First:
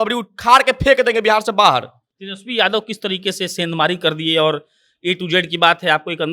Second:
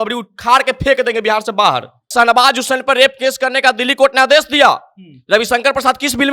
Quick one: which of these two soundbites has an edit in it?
second; 1 cut; at 2.1 s

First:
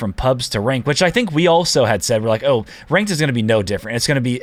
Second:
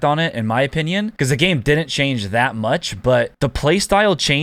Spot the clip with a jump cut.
second; 2 cuts; at 1.1 s, 3.3 s

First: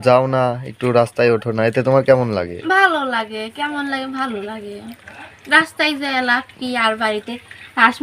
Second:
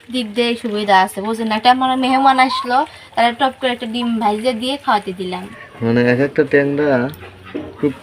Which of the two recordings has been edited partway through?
second; 1 cut; at 5.5 s

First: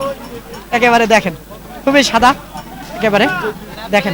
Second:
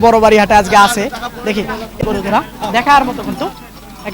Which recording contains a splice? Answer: second; 1 cut; at 1.9 s

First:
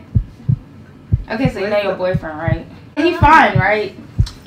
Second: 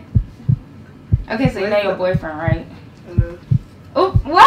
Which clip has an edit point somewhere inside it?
first; 1 cut; at 3.0 s

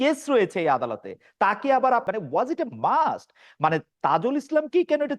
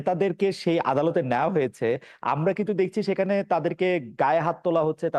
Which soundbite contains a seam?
first; 1 cut; at 2.1 s

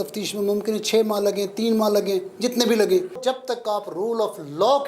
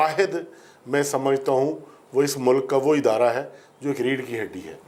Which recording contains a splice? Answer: first; 1 cut; at 3.2 s

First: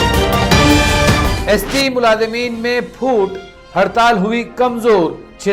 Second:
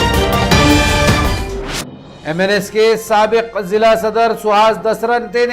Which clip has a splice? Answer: second; 1 cut; at 1.4 s

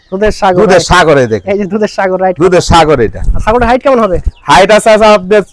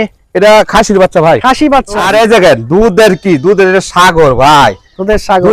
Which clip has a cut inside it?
second; 1 cut; at 2.0 s

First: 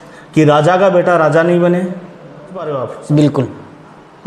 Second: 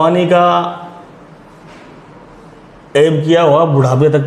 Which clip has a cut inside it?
first; 1 cut; at 2.7 s

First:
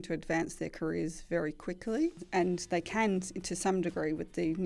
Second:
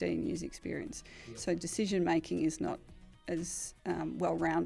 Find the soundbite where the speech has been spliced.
first; 1 cut; at 2.2 s

